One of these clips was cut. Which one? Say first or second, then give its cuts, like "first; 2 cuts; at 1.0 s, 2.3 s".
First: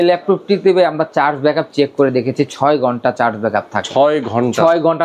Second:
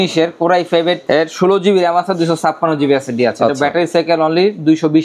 second; 1 cut; at 1.0 s